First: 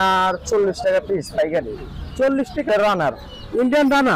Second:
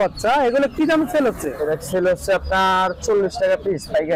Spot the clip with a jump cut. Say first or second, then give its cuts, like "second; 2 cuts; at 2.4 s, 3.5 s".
first; 1 cut; at 2.7 s